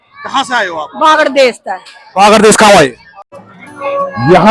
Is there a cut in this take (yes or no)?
yes